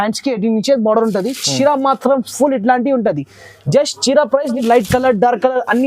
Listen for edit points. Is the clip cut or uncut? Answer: cut